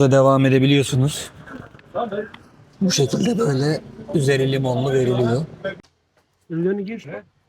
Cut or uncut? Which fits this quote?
cut